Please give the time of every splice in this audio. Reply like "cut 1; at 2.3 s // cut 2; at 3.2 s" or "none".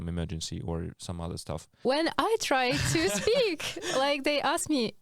cut 1; at 1.7 s